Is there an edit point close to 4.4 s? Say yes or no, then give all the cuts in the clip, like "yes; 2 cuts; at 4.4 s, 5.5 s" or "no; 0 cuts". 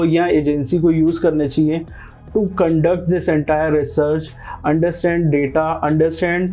no; 0 cuts